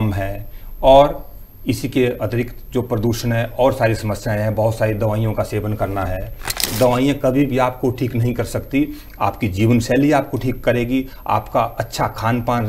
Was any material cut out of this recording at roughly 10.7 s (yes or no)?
no